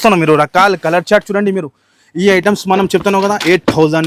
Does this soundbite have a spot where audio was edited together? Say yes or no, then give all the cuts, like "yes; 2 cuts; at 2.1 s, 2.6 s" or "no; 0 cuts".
no; 0 cuts